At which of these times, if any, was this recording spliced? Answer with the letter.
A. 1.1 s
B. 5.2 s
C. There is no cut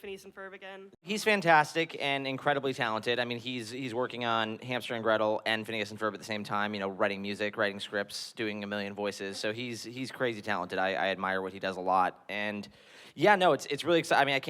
A